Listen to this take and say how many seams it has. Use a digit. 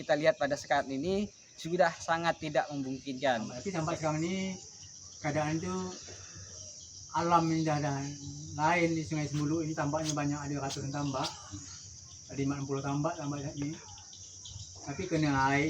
1